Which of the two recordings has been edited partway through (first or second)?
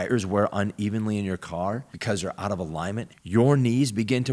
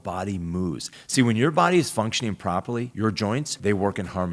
second